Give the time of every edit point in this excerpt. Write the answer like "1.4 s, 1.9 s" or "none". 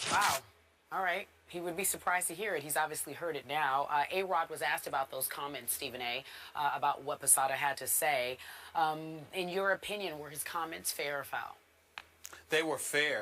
5.7 s